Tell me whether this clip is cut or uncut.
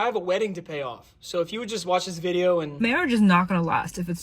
cut